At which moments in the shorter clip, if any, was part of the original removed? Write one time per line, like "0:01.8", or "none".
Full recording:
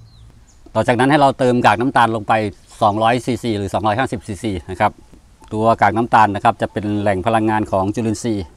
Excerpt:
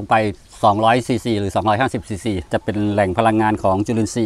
0:02.5